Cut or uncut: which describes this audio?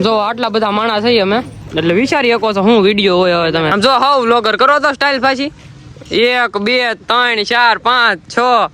cut